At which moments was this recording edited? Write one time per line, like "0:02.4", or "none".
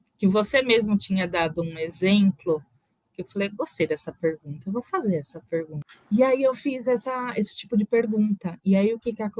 0:05.8